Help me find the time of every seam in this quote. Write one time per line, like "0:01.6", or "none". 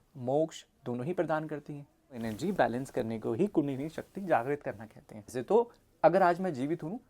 0:02.2
0:05.4